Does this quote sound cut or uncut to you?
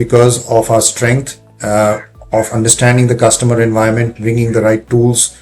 uncut